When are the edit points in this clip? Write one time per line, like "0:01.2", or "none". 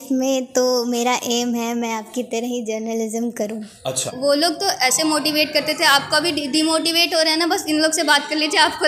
0:04.1

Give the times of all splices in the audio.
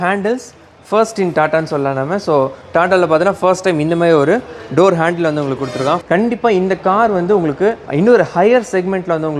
0:06.0
0:07.8

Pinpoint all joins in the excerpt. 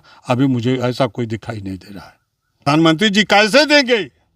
0:02.6

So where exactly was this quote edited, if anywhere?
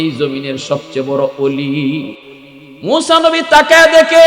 0:02.2

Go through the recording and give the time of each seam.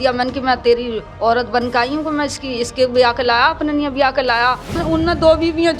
0:04.8

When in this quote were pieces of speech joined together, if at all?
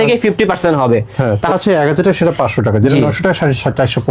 0:01.5

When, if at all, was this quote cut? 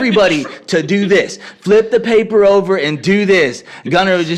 none

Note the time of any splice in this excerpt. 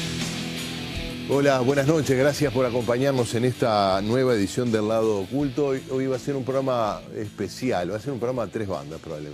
0:01.2

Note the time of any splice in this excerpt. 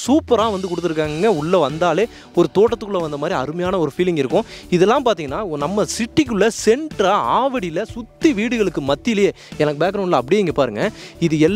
none

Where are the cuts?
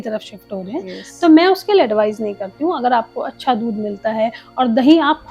none

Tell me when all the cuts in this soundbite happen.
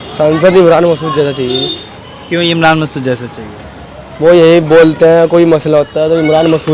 none

